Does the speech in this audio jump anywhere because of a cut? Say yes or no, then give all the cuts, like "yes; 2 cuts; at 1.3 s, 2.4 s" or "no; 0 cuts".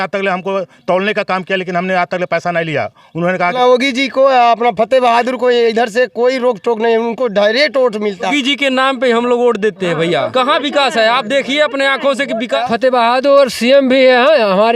yes; 4 cuts; at 3.5 s, 8.3 s, 10.3 s, 12.6 s